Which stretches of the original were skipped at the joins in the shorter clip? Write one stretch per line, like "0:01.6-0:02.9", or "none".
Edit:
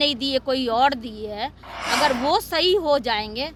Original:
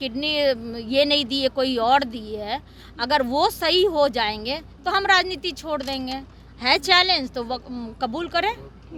none